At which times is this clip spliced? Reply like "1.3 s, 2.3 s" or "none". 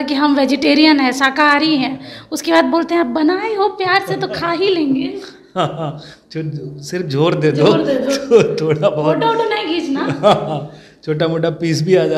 none